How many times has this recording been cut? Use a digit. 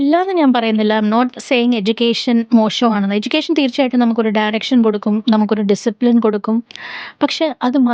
0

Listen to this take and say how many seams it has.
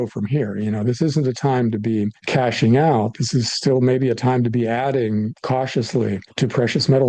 3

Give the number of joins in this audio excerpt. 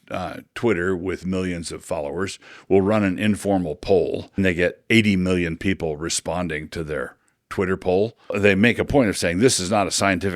2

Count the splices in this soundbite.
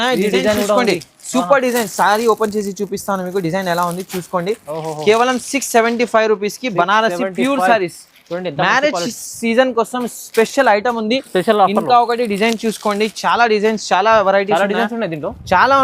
0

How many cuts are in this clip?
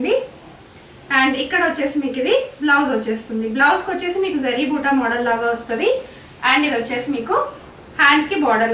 0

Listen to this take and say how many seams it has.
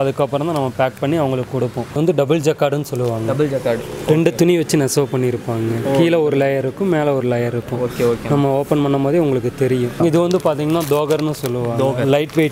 2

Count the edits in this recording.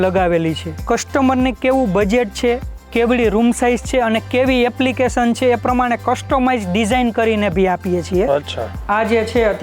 2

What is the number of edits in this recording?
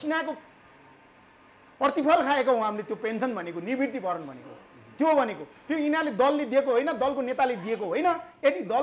0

